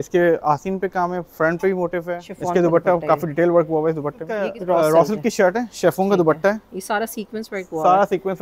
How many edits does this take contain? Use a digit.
2